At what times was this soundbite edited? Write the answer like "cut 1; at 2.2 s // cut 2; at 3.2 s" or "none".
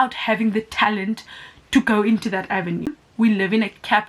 cut 1; at 3.0 s